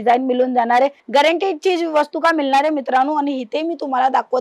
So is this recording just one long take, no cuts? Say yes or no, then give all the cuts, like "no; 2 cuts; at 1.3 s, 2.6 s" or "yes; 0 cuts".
no; 1 cut; at 1.0 s